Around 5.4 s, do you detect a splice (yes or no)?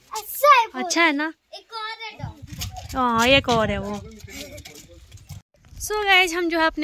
yes